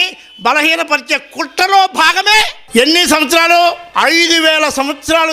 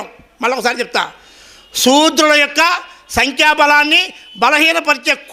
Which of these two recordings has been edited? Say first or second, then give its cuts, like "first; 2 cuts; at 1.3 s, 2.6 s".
first; 2 cuts; at 2.6 s, 3.8 s